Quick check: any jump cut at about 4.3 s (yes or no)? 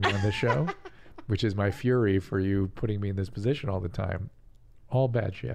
yes